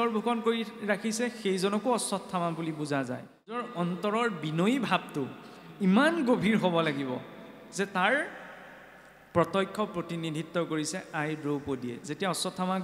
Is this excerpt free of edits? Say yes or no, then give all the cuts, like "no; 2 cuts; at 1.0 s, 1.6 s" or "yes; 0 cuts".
no; 1 cut; at 3.7 s